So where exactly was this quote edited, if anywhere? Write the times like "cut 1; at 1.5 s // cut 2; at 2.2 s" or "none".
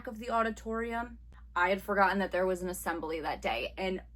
cut 1; at 1.2 s